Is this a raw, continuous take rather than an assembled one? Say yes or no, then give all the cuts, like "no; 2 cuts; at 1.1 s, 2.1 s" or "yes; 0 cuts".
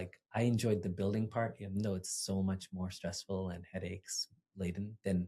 yes; 0 cuts